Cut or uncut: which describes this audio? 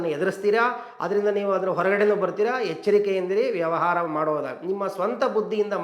uncut